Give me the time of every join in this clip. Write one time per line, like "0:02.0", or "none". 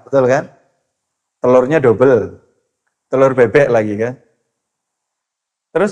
none